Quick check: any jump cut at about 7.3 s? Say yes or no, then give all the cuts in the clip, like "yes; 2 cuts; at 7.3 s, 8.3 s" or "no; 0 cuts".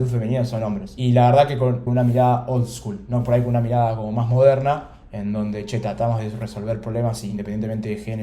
yes; 3 cuts; at 1.0 s, 1.8 s, 7.3 s